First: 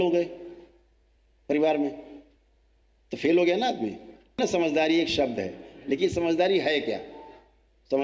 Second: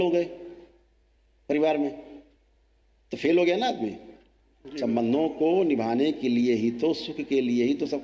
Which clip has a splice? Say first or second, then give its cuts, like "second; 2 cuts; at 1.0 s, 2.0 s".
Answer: first; 1 cut; at 4.4 s